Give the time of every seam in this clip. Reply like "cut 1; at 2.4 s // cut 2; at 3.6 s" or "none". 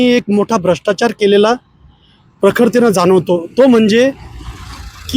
none

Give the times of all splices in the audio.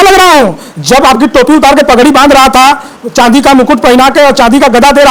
none

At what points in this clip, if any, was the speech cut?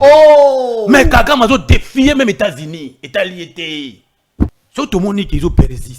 cut 1; at 4.6 s

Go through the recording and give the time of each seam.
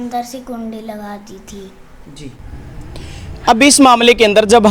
none

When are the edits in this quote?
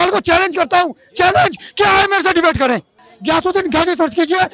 cut 1; at 3.1 s

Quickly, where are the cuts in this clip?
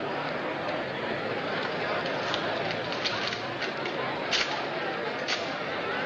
none

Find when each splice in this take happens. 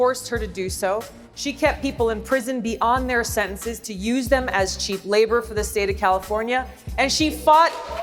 none

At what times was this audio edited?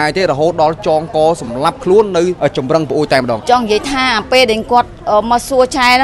cut 1; at 2.4 s // cut 2; at 3.4 s

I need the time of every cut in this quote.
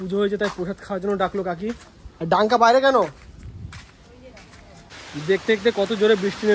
cut 1; at 4.9 s

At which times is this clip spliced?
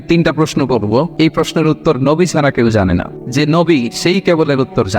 cut 1; at 1.1 s // cut 2; at 3.2 s

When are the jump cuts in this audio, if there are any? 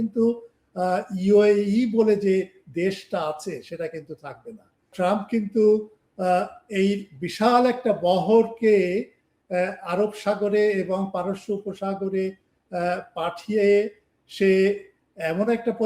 cut 1; at 4.8 s

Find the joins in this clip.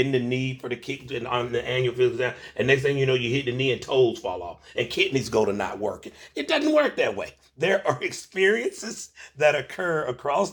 none

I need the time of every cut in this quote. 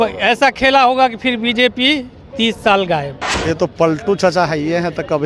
cut 1; at 3.2 s

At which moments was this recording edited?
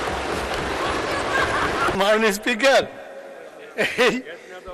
cut 1; at 1.9 s

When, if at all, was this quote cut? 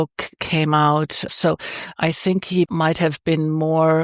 cut 1; at 1.3 s // cut 2; at 2.7 s

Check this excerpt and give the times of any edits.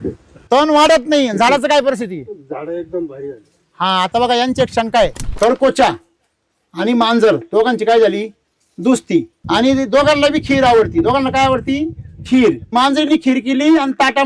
cut 1; at 5.2 s // cut 2; at 9.4 s // cut 3; at 12.7 s

